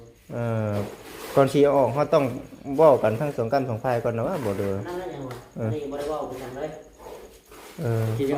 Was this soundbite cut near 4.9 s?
no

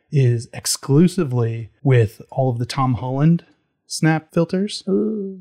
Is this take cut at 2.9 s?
no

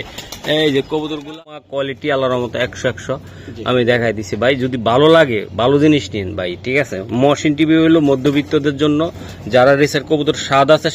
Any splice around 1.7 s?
yes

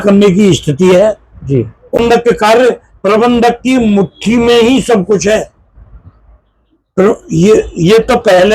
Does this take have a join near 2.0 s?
yes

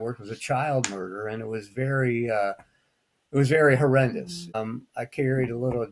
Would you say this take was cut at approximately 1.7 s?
no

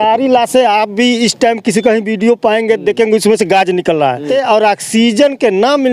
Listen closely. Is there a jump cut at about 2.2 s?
no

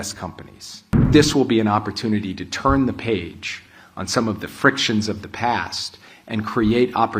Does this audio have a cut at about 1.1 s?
yes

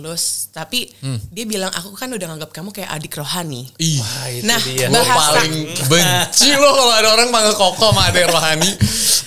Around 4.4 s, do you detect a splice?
no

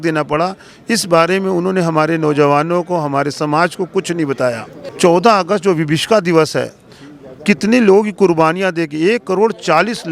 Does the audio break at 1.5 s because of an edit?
no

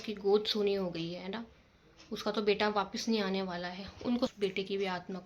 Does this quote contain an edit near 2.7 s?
no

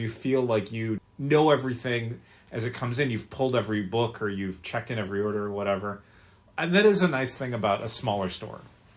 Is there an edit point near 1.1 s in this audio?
yes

